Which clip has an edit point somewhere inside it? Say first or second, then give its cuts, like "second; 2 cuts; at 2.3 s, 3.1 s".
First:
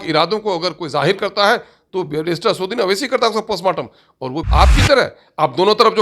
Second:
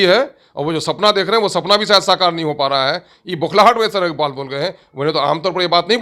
first; 1 cut; at 4.4 s